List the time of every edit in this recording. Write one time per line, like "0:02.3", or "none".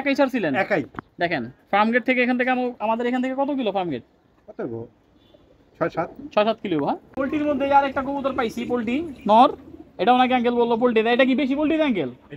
0:07.1